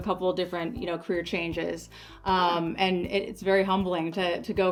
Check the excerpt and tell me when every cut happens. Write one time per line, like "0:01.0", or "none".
none